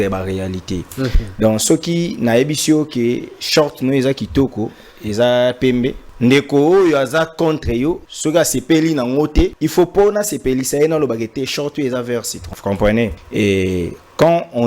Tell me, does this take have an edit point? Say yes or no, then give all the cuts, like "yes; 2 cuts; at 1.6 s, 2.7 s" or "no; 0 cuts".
yes; 5 cuts; at 6.0 s, 8.1 s, 9.6 s, 12.4 s, 13.2 s